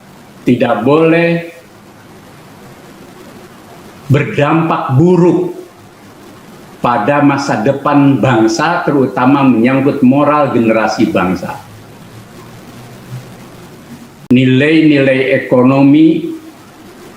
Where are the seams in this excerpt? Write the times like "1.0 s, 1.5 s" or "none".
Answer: 14.3 s